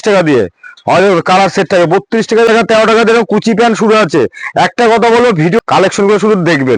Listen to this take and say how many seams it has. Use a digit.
2